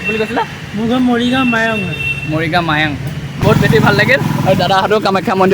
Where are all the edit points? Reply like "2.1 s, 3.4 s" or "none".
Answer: 3.4 s